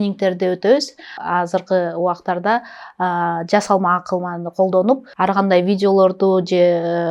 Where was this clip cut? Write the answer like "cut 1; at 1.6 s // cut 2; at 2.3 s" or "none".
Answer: cut 1; at 1.1 s // cut 2; at 5.1 s